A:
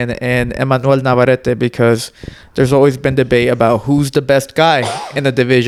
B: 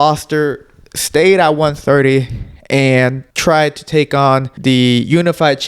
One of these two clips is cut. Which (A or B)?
B